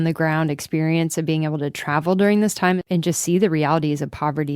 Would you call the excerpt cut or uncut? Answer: cut